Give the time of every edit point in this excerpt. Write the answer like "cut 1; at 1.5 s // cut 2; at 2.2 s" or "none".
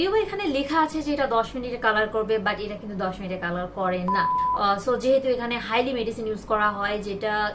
cut 1; at 4.4 s

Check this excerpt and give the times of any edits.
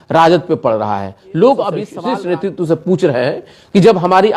cut 1; at 1.9 s

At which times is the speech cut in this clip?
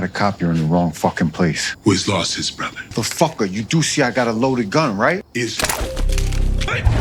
none

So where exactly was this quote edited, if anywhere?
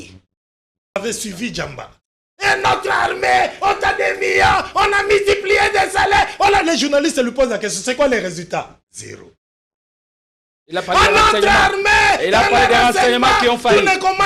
cut 1; at 1.0 s

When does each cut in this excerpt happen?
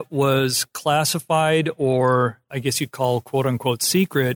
cut 1; at 2.5 s

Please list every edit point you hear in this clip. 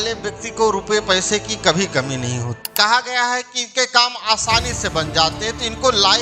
cut 1; at 2.6 s

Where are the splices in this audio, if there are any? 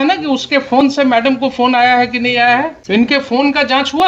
cut 1; at 2.8 s

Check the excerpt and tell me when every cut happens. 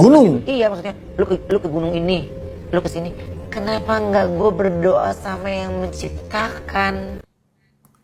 none

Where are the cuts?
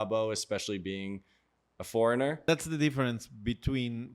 cut 1; at 2.4 s

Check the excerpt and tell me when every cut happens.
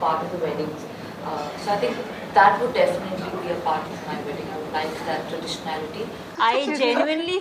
cut 1; at 6.3 s

